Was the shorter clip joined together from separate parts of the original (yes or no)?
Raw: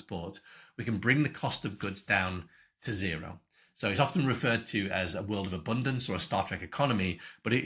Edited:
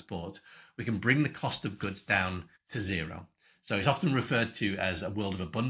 yes